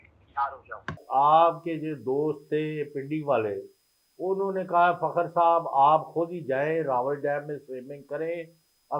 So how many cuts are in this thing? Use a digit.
1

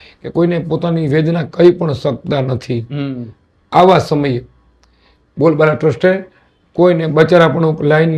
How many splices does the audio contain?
0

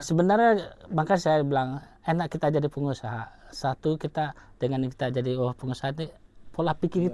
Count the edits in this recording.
0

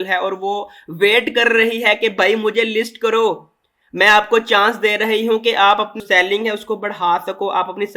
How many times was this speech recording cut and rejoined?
1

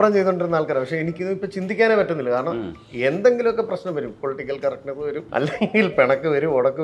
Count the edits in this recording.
2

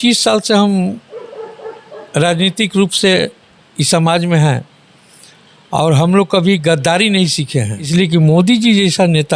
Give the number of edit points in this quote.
1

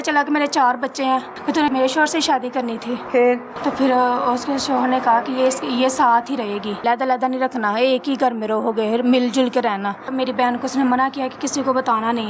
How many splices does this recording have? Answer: 4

